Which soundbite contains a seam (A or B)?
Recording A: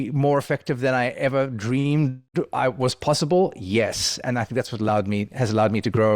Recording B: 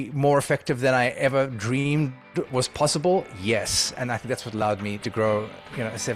B